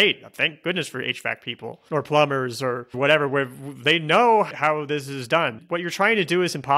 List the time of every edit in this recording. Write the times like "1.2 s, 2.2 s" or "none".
5.6 s